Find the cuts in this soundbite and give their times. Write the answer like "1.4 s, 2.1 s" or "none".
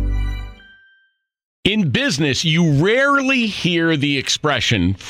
1.5 s